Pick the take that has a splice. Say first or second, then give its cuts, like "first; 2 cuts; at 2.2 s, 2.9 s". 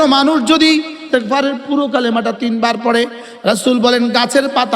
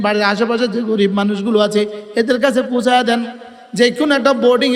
first; 1 cut; at 1.0 s